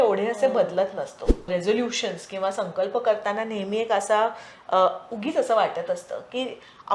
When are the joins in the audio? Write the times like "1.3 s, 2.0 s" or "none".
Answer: 1.5 s